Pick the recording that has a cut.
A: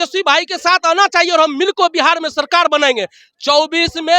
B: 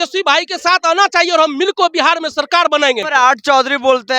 B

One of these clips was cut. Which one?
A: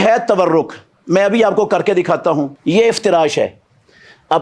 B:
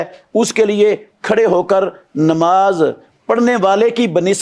A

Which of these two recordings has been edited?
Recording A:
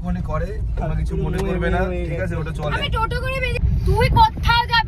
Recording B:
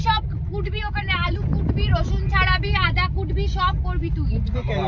A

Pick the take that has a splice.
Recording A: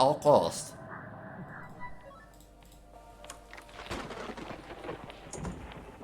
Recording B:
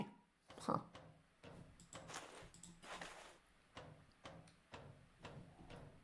A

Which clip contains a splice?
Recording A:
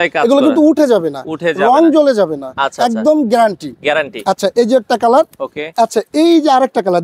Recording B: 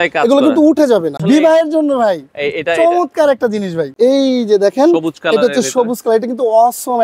B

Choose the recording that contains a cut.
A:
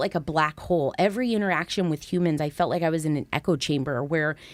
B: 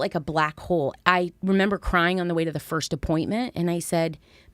B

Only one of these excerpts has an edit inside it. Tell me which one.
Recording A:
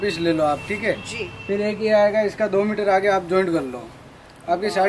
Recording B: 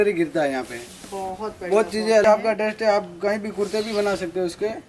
B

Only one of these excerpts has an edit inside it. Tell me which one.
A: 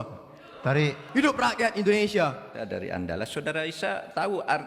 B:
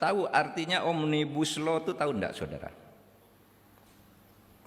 A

